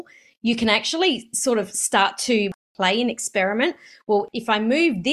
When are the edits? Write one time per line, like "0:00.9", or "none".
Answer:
0:02.5
0:04.3